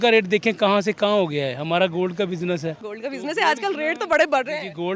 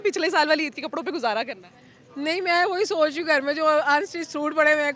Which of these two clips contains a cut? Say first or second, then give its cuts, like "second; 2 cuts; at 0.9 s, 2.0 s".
first; 1 cut; at 2.9 s